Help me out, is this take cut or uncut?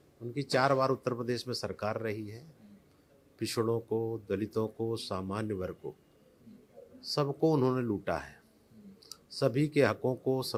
uncut